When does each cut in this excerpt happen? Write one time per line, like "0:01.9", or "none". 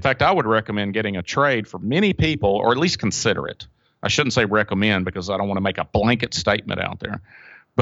none